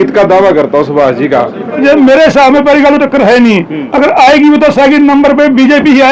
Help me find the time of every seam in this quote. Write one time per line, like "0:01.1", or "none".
0:01.8